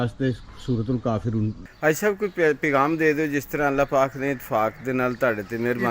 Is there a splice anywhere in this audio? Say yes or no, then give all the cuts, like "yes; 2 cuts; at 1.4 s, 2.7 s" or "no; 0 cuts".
yes; 1 cut; at 1.6 s